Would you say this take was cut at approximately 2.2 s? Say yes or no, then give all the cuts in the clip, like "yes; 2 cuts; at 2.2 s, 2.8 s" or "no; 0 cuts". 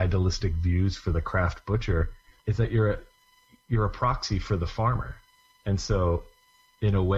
yes; 1 cut; at 2.2 s